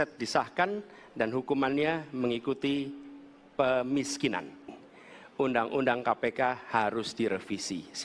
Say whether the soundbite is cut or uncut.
cut